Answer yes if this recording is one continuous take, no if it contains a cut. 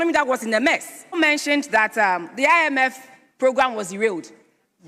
no